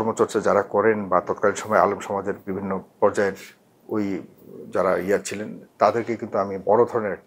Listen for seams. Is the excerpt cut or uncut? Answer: uncut